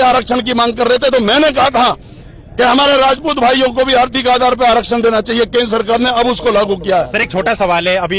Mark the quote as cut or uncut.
uncut